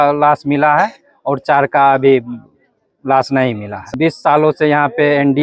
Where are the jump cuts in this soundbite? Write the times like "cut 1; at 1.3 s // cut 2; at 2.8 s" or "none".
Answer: cut 1; at 3.9 s